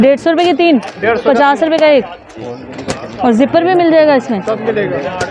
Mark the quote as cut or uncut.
uncut